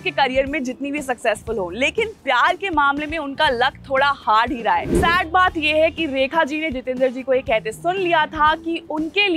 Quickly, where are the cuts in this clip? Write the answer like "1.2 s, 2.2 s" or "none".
4.9 s